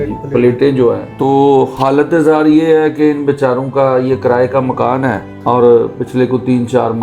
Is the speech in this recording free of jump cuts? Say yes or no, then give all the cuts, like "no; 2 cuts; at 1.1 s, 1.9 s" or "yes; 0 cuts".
no; 2 cuts; at 1.1 s, 5.3 s